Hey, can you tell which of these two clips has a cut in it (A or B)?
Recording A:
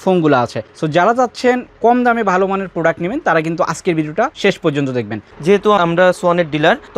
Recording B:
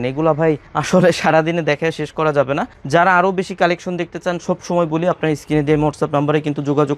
A